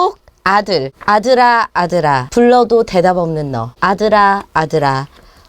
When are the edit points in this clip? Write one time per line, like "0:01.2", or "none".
0:00.9
0:02.3
0:03.6